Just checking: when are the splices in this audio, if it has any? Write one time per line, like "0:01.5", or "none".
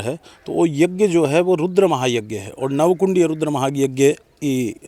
none